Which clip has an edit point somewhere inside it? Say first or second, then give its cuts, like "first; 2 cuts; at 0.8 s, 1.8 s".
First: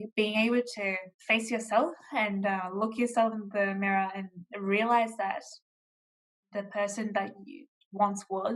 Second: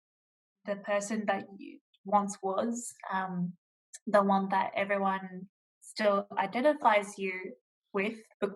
first; 1 cut; at 1.1 s